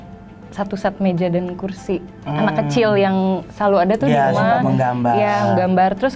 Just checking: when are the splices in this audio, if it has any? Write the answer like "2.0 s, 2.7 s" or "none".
none